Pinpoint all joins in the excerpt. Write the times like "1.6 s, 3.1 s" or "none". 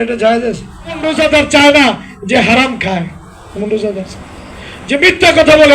1.2 s